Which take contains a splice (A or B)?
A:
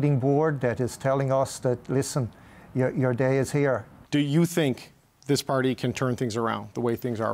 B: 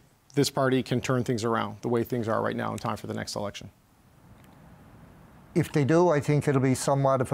A